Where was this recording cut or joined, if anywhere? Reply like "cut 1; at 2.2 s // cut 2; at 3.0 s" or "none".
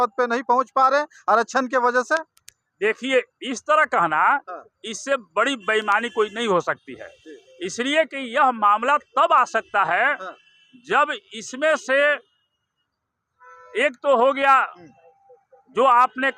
none